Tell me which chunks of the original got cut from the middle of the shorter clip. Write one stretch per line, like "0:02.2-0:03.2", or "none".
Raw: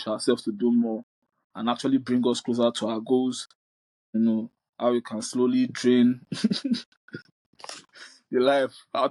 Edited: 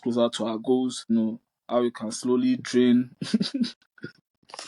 0:03.5-0:04.2